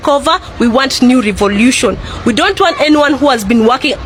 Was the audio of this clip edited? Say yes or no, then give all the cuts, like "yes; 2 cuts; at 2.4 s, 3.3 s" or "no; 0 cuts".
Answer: no; 0 cuts